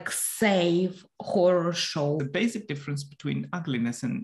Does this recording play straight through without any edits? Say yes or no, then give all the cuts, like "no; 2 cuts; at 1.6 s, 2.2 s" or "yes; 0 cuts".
no; 1 cut; at 2.2 s